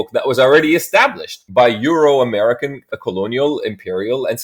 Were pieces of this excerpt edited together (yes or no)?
no